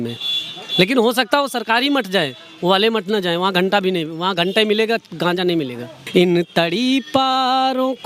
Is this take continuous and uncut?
no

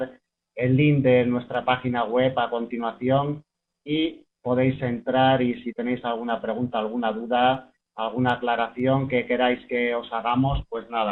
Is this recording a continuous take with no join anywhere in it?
no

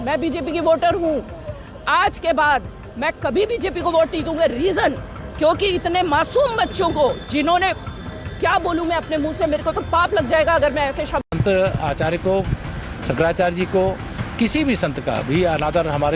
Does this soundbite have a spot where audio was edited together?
yes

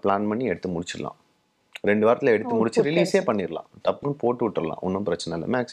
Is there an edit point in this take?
no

